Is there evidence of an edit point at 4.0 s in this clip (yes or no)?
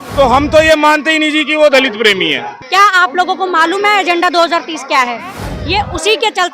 no